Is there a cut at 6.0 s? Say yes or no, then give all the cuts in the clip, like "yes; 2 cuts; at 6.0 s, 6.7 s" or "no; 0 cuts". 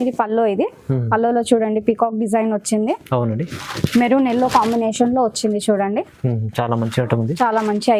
no; 0 cuts